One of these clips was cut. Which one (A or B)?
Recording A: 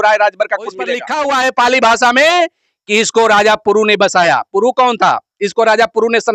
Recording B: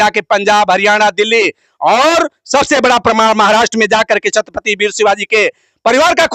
A